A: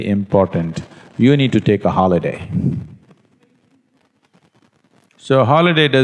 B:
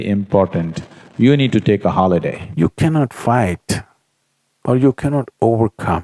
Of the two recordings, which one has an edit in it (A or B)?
B